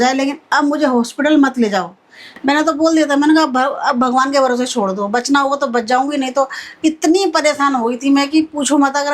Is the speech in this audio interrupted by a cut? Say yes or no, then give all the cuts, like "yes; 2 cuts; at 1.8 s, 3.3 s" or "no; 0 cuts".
yes; 1 cut; at 2.2 s